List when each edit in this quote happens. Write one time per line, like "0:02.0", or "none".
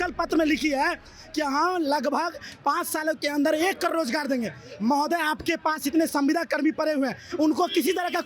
none